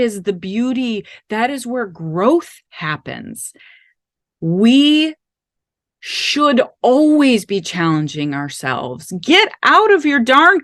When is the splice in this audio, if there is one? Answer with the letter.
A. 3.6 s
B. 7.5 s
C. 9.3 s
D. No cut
D